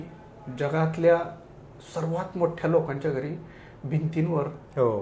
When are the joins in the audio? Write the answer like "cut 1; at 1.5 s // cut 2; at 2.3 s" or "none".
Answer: none

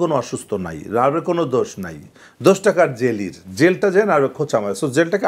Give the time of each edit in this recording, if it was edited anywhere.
none

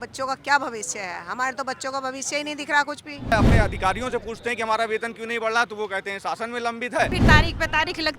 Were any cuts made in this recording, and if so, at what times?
cut 1; at 3.3 s // cut 2; at 7.2 s

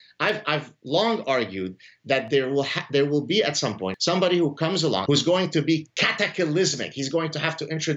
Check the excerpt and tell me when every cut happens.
cut 1; at 3.9 s // cut 2; at 5.0 s

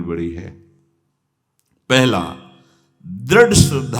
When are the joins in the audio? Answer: none

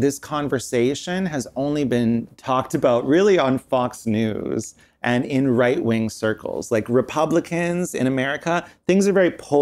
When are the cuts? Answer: none

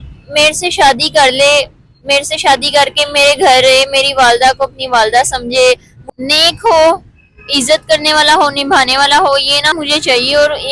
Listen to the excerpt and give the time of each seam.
cut 1; at 5.9 s // cut 2; at 9.7 s

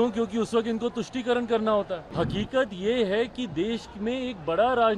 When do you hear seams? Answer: cut 1; at 2.0 s

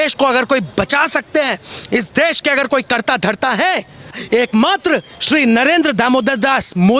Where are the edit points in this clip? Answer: cut 1; at 4.2 s

